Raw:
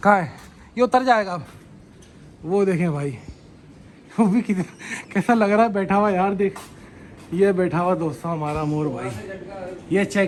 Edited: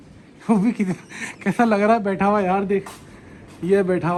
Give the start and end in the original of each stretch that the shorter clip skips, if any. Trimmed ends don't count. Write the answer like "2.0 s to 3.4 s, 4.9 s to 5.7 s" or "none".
none